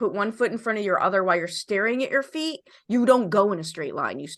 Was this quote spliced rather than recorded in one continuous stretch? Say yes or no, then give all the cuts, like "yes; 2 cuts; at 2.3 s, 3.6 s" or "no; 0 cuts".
no; 0 cuts